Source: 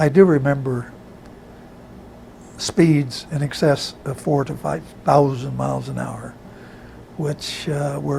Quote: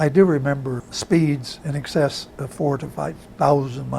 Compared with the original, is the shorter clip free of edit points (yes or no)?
no